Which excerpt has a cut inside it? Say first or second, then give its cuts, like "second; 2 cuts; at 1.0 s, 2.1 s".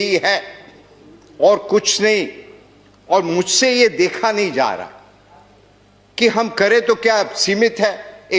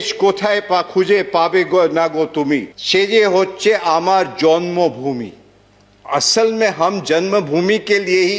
second; 1 cut; at 2.8 s